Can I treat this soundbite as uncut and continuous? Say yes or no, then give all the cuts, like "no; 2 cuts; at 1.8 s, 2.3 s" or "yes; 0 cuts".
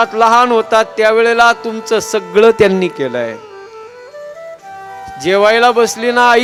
yes; 0 cuts